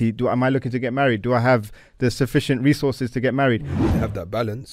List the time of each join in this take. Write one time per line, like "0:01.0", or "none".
0:03.8